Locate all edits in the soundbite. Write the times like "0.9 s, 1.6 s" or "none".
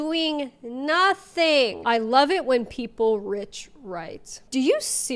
1.8 s

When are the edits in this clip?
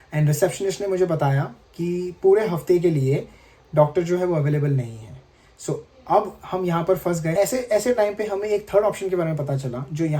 7.3 s

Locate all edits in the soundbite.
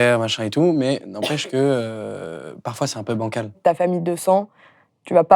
3.6 s

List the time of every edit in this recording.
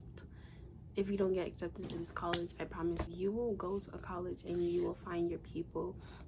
3.1 s

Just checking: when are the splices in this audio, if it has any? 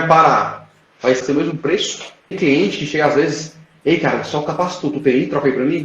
1.2 s, 2.4 s

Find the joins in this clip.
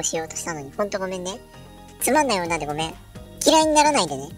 none

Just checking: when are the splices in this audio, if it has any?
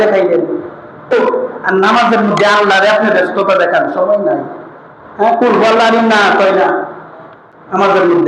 1.1 s

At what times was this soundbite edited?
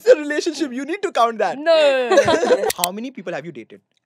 2.7 s

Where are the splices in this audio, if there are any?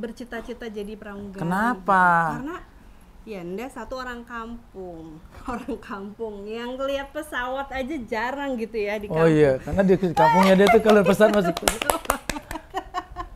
none

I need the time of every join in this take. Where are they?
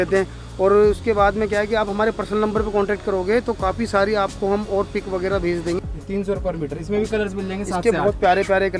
5.8 s

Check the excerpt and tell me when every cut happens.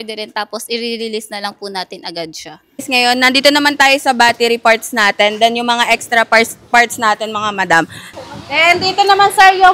2.8 s, 8.0 s

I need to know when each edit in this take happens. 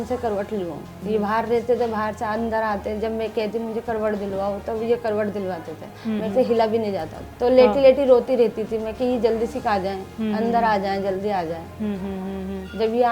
0.9 s, 7.2 s

